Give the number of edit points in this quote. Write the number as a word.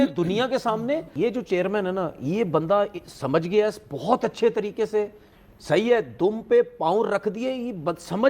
two